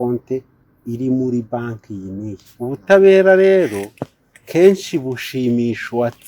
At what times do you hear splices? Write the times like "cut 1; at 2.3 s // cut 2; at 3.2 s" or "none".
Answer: cut 1; at 2.4 s